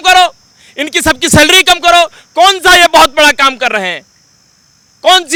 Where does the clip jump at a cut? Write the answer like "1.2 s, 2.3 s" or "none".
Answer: none